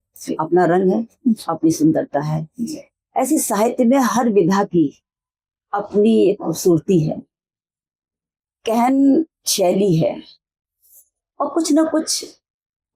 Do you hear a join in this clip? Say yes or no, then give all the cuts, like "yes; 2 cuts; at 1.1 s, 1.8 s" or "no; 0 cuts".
no; 0 cuts